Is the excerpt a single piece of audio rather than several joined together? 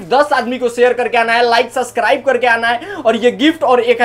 yes; 0 cuts

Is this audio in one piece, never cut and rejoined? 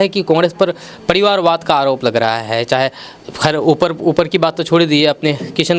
yes; 0 cuts

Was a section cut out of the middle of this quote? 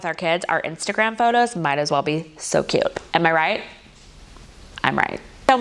no; 0 cuts

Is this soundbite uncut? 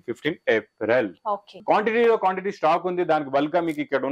no; 1 cut; at 1.5 s

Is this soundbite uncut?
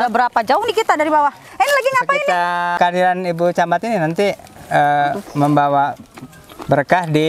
no; 1 cut; at 2.8 s

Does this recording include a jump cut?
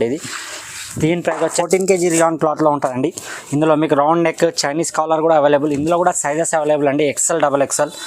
yes; 1 cut; at 1.5 s

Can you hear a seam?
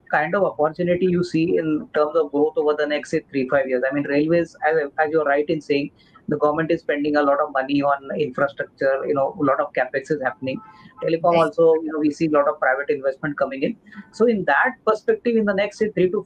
no; 0 cuts

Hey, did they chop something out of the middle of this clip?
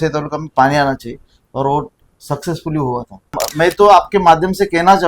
yes; 1 cut; at 3.4 s

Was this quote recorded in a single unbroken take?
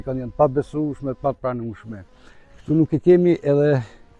yes; 0 cuts

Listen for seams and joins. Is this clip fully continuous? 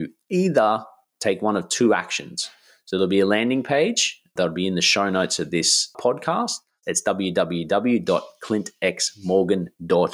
no; 3 cuts; at 4.3 s, 6.0 s, 6.7 s

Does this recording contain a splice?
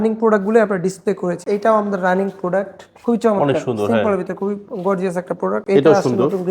yes; 1 cut; at 1.4 s

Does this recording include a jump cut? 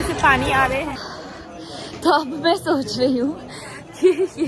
yes; 1 cut; at 0.9 s

